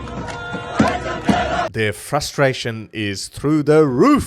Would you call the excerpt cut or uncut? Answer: cut